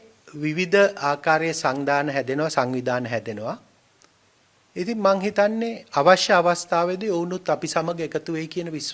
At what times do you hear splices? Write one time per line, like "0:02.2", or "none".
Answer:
none